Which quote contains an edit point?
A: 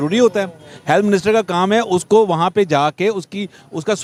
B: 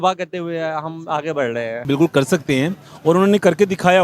B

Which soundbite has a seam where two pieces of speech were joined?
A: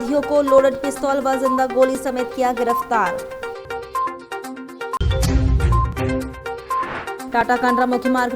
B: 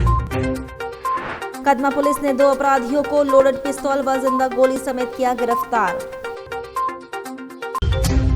B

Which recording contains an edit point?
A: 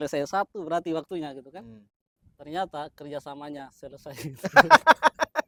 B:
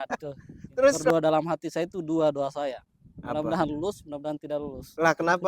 B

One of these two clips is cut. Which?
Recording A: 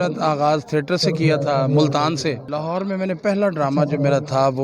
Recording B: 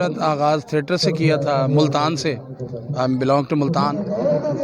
A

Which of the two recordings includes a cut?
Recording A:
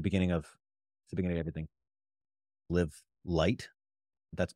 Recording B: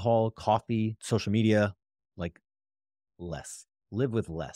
A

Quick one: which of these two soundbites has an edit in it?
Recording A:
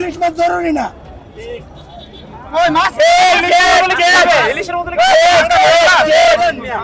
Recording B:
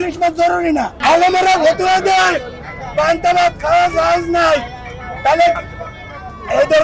B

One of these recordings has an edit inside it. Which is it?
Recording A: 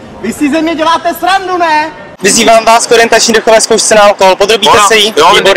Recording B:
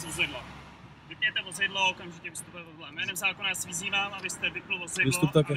A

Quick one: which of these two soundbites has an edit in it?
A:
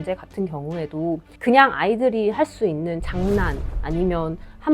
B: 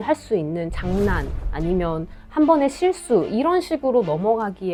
A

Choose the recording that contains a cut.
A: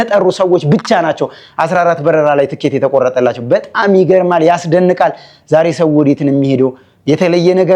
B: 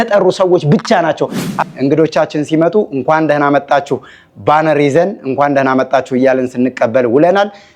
B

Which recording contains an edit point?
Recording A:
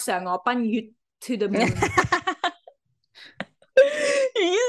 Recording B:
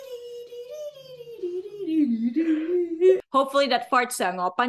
B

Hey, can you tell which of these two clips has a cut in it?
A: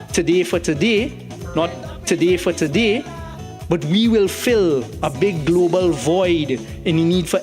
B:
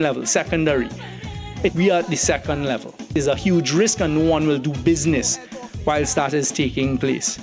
A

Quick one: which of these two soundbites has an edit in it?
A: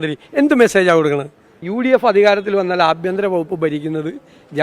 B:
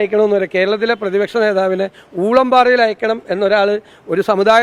A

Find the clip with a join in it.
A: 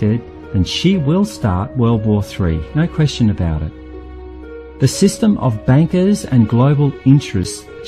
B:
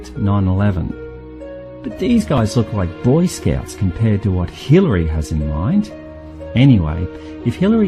B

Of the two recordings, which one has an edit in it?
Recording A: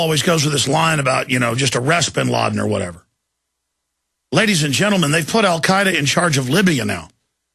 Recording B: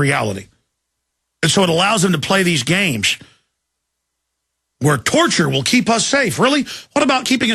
A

